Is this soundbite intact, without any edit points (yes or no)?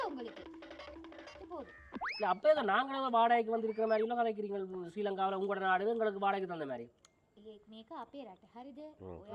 no